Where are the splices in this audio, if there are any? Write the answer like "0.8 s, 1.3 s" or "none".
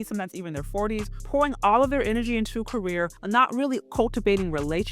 1.2 s, 3.2 s